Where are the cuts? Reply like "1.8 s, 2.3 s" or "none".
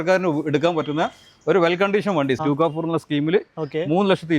2.4 s